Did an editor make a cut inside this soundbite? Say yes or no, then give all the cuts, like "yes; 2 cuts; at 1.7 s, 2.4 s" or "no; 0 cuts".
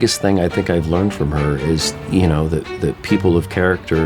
yes; 1 cut; at 1.9 s